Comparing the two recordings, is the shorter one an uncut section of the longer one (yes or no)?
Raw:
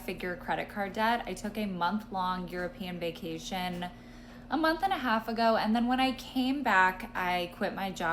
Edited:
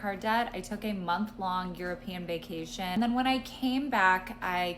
no